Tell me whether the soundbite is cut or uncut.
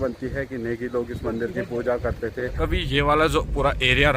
cut